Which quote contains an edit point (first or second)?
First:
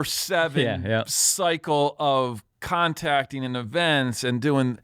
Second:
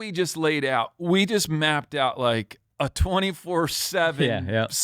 second